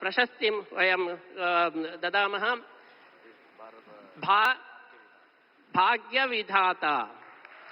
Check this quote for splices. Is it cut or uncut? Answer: cut